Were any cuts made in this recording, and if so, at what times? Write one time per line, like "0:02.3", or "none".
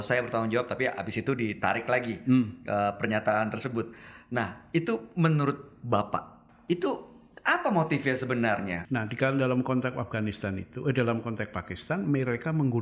0:06.4
0:08.8